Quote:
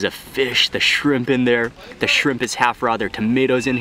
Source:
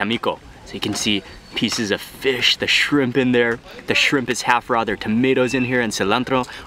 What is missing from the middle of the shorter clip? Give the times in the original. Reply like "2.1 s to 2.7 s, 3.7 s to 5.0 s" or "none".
none

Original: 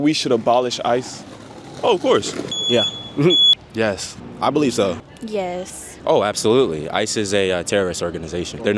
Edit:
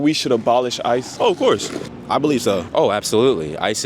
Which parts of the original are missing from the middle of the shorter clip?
1.1 s to 1.7 s, 2.5 s to 4.2 s, 5.0 s to 6.0 s

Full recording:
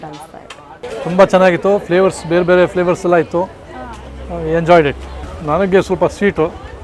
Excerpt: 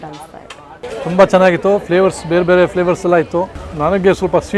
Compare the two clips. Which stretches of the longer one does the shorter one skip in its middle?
3.6 s to 5.3 s

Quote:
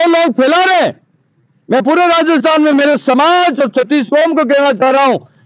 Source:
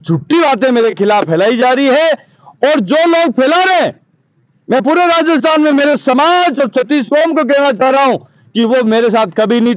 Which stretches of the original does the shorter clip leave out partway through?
none

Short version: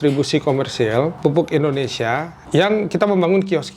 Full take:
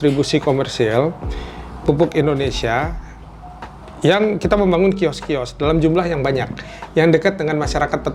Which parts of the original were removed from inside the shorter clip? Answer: 1.1 s to 1.8 s, 3.0 s to 3.9 s

